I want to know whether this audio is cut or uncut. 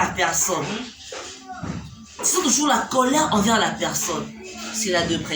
uncut